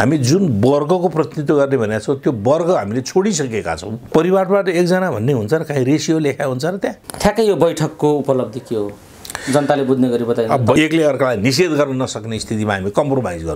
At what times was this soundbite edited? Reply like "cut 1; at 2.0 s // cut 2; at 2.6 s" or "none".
cut 1; at 3.9 s // cut 2; at 7.1 s // cut 3; at 10.8 s